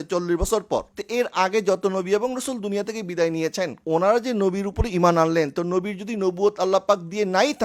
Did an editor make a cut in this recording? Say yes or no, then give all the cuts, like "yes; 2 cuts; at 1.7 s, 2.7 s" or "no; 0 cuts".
yes; 2 cuts; at 1.0 s, 3.8 s